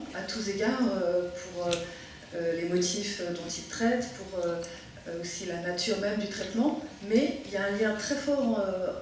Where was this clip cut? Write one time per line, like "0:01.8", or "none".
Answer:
0:03.0